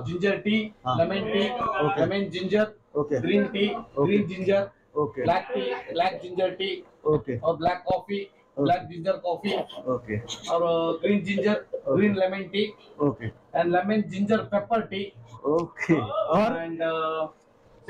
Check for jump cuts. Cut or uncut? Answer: uncut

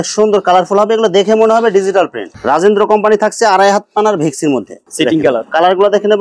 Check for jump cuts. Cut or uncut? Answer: cut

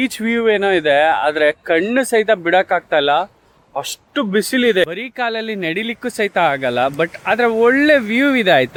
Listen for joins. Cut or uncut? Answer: uncut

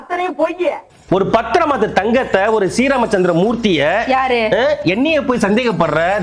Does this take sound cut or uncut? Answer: cut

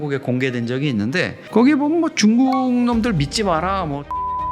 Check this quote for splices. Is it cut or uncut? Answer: cut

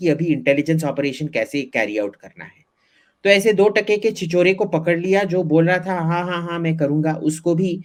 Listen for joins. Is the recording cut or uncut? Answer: uncut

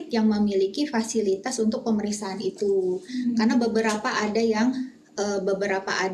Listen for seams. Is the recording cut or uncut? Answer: uncut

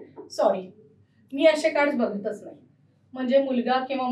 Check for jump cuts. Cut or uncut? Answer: uncut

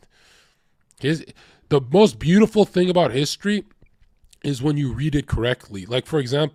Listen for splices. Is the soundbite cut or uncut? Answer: uncut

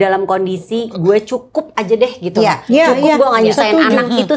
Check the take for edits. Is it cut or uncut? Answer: uncut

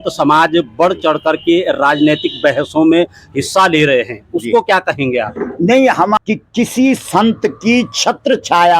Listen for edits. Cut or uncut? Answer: cut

